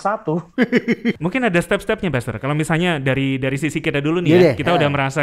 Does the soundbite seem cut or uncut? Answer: cut